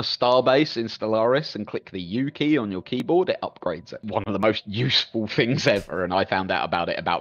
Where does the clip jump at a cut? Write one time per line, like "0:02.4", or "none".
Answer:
0:03.9